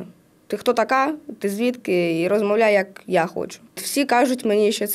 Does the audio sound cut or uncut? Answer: cut